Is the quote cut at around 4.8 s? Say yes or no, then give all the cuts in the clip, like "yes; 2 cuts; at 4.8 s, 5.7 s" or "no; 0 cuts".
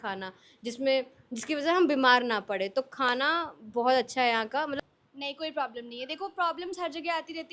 yes; 1 cut; at 4.8 s